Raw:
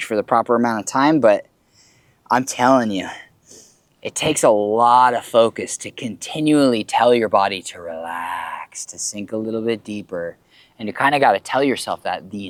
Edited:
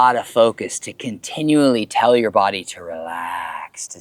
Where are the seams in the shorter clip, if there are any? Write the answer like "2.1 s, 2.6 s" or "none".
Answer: none